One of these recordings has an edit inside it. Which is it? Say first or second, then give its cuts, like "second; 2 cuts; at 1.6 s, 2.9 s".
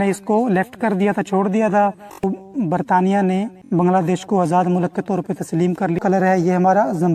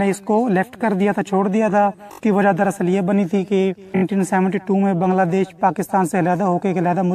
first; 2 cuts; at 2.2 s, 6.0 s